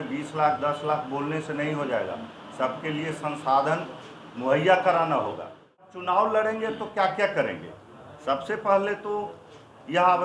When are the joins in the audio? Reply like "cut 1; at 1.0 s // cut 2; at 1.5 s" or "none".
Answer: cut 1; at 5.8 s

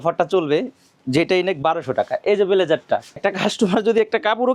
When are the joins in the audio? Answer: cut 1; at 3.1 s

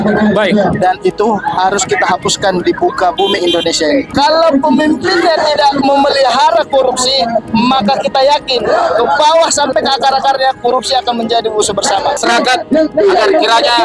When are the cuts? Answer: cut 1; at 4.1 s // cut 2; at 12.2 s

